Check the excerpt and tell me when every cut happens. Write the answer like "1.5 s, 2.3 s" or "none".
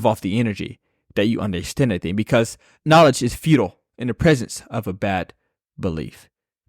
2.8 s